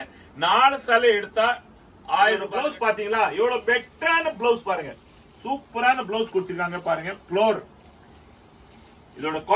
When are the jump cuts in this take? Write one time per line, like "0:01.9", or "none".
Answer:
0:02.5